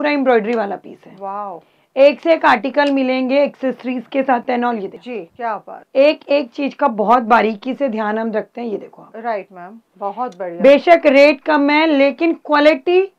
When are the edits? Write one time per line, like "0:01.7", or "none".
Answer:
none